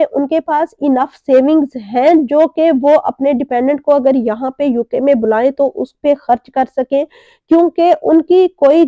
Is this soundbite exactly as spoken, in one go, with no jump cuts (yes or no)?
yes